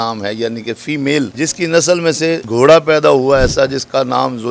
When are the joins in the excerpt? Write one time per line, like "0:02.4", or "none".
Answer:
0:01.3
0:02.4